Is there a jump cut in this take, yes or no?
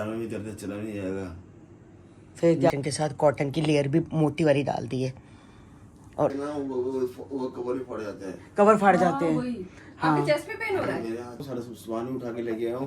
yes